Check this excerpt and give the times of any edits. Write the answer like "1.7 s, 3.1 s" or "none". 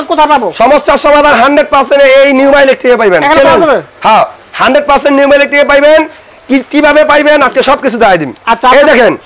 none